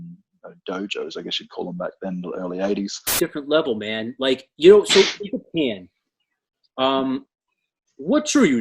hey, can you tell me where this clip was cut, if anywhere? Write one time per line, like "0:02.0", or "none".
0:03.1